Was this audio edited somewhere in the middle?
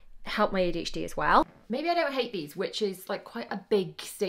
yes; 1 cut; at 1.6 s

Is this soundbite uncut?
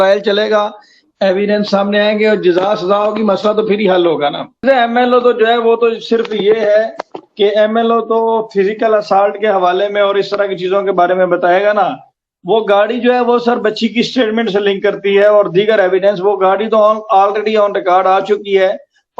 yes; 0 cuts

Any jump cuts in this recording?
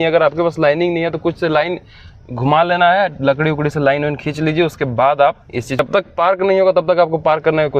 yes; 1 cut; at 5.8 s

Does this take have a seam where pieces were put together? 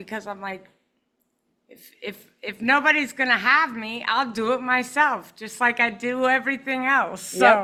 no; 0 cuts

